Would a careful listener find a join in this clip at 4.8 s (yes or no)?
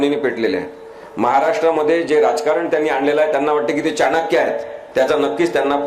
yes